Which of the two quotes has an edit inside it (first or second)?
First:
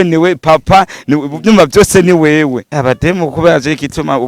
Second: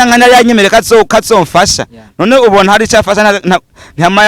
first